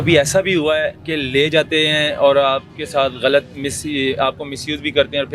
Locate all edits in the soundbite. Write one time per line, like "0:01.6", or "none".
0:01.0